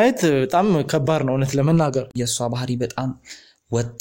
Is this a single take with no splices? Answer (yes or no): no